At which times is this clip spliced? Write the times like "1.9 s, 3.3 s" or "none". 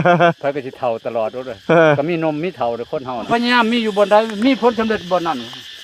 3.3 s